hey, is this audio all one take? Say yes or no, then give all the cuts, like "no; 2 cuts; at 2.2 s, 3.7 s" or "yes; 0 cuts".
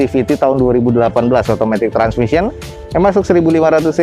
yes; 0 cuts